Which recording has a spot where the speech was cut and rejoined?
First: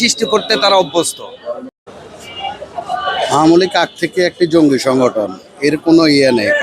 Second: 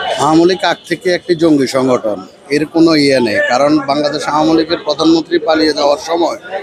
first; 1 cut; at 1.7 s

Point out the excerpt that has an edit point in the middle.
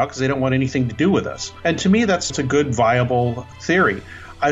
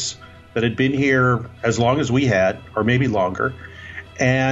first; 3 cuts; at 1.4 s, 2.3 s, 3.4 s

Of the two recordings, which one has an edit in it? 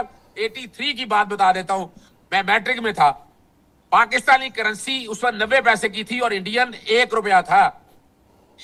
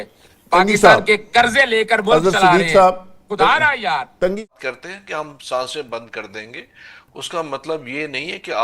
second; 1 cut; at 4.5 s

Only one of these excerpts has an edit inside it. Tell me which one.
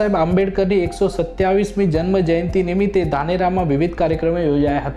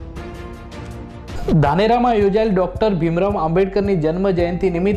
second; 1 cut; at 1.3 s

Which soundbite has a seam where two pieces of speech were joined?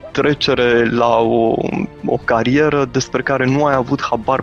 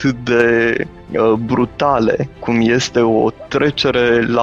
second; 2 cuts; at 1.0 s, 2.3 s

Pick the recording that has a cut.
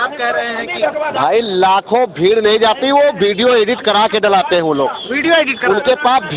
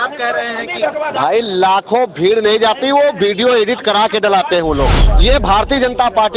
second; 1 cut; at 5.0 s

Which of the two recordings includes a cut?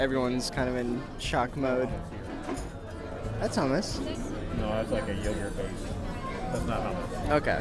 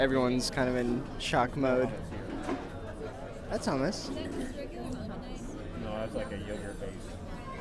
first; 2 cuts; at 3.1 s, 4.2 s

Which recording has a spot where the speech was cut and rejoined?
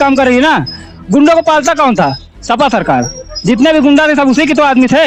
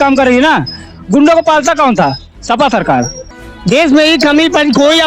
second; 1 cut; at 3.3 s

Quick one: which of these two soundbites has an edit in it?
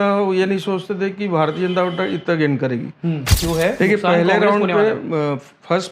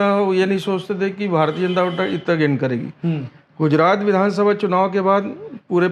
first; 1 cut; at 3.3 s

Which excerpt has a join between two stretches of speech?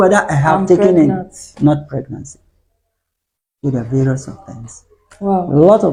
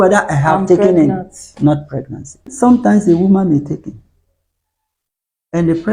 second; 1 cut; at 2.5 s

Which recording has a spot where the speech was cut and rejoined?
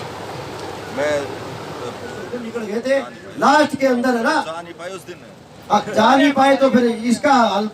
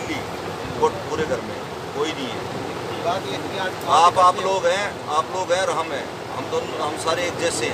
first; 1 cut; at 2.5 s

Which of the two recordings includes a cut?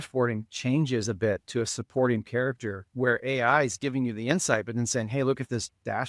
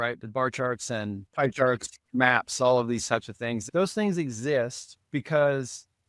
second; 3 cuts; at 1.2 s, 2.0 s, 3.6 s

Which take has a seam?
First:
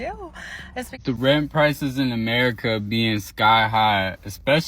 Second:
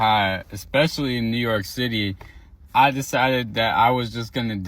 first; 1 cut; at 1.0 s

